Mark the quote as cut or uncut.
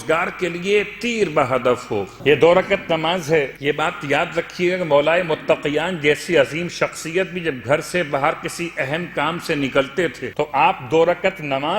cut